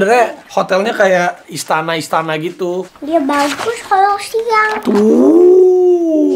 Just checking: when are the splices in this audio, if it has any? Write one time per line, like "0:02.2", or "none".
0:01.5
0:02.9

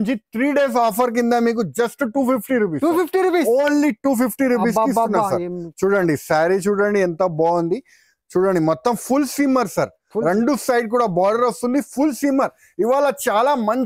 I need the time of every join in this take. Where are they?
none

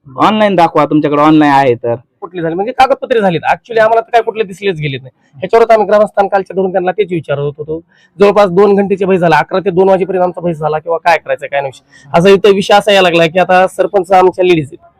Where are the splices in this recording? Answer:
0:02.2

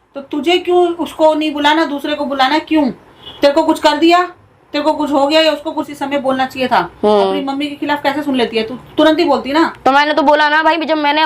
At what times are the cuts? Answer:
0:05.8

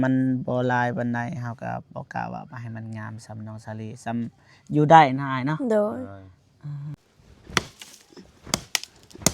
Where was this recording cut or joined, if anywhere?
0:07.0

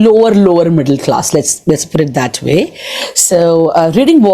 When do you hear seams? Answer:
none

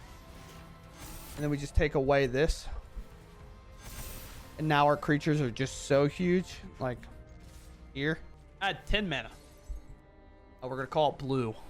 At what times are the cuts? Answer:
0:08.4

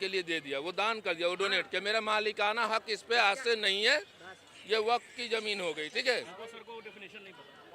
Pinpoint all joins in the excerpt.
none

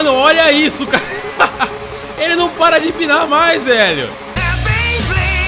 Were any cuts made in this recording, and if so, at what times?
none

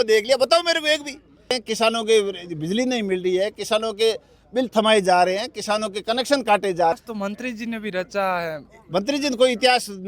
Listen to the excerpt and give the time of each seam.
0:01.6
0:07.0

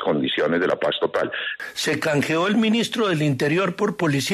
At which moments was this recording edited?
0:01.4

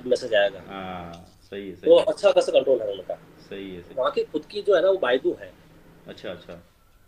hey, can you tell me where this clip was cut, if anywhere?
0:03.9

